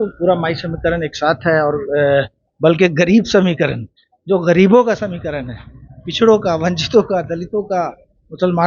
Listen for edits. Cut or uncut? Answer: uncut